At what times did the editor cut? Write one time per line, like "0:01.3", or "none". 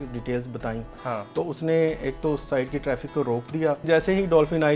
0:03.8

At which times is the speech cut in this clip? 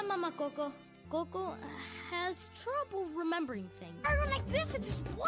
0:00.9

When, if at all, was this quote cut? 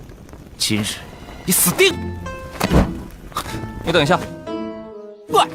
none

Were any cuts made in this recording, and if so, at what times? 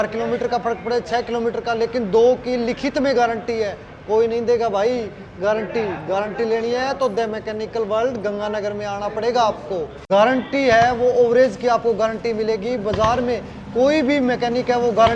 0:10.0

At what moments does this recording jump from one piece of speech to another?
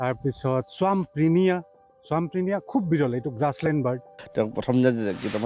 0:04.2

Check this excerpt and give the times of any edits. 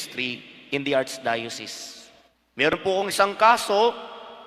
0:02.7

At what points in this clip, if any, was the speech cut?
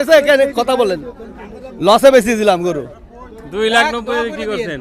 none

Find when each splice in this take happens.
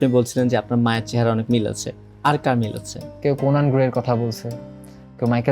0:03.0

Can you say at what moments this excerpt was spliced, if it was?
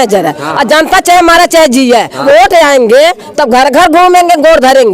0:02.2

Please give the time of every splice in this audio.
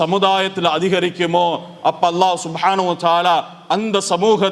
none

